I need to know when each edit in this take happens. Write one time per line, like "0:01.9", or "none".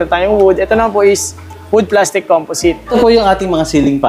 0:02.9